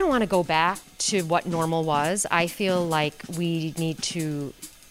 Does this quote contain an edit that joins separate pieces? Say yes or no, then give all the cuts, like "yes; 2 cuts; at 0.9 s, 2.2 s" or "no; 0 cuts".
yes; 1 cut; at 0.9 s